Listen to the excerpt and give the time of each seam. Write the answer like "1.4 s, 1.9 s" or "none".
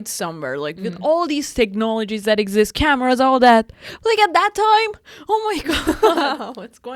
none